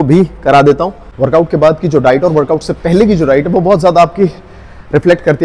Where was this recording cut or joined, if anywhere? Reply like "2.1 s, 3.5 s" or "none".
1.0 s